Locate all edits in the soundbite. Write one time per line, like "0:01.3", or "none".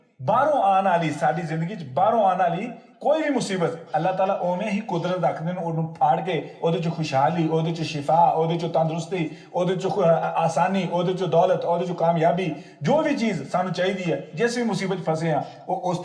none